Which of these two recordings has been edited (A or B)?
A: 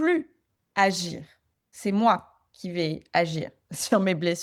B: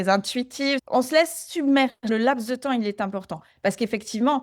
B